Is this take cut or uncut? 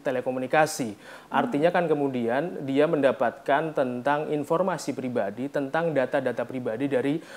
uncut